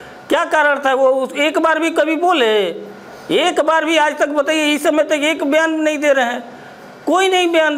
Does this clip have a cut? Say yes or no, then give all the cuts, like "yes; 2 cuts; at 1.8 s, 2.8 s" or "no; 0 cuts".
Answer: no; 0 cuts